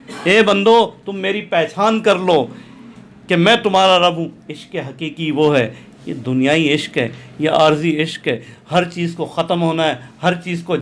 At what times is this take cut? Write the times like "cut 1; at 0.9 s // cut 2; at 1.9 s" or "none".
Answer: none